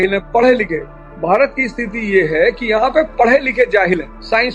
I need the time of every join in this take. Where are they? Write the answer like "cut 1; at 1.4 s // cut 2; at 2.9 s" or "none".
none